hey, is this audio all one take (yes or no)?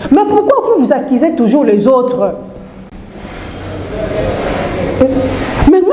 yes